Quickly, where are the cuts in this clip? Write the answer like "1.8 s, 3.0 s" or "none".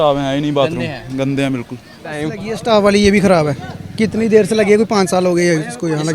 2.2 s